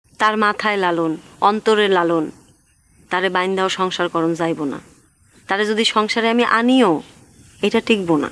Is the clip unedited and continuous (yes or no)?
yes